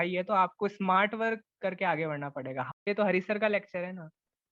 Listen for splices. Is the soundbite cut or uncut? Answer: cut